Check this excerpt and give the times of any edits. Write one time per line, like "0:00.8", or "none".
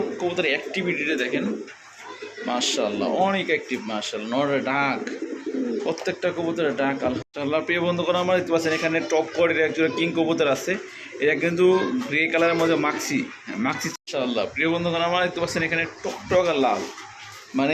0:07.2
0:13.9